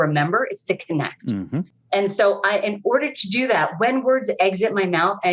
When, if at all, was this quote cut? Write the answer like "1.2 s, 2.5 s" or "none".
1.8 s